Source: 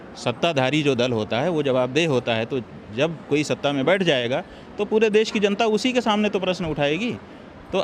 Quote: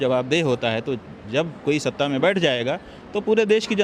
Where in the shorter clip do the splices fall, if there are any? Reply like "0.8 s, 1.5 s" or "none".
none